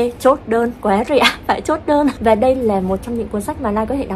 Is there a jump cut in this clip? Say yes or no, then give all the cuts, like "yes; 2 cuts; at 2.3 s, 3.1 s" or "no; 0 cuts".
yes; 1 cut; at 2.2 s